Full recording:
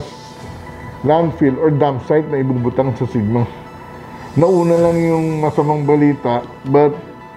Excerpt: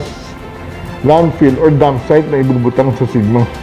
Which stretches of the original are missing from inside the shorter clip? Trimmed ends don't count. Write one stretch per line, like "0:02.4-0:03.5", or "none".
none